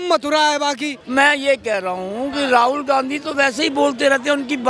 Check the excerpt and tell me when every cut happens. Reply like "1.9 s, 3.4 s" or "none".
0.9 s